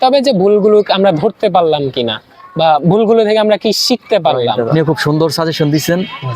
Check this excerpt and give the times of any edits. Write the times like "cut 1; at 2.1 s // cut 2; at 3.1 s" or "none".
cut 1; at 4.7 s